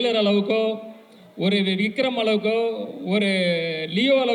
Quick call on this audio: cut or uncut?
uncut